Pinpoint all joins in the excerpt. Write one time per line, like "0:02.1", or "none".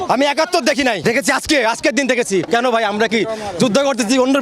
0:01.0
0:02.5